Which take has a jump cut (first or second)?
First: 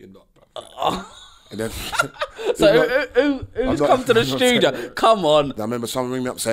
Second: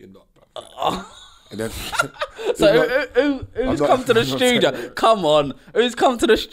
first